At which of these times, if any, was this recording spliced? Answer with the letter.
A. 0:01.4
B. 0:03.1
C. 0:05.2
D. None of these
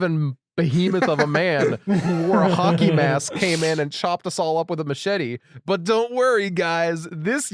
D